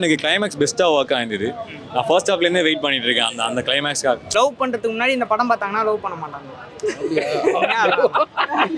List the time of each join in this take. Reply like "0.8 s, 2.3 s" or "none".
4.3 s